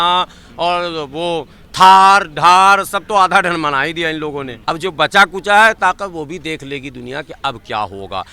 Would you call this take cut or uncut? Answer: cut